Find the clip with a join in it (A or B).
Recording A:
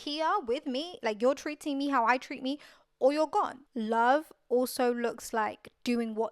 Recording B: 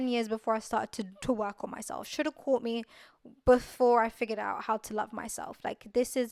A